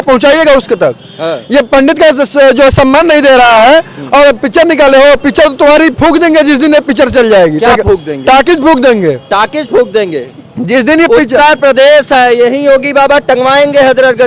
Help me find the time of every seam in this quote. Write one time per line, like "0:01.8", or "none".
none